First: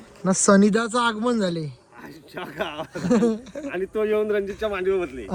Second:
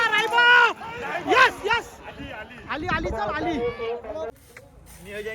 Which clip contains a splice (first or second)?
second